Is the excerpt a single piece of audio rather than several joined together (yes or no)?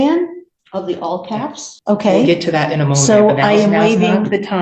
no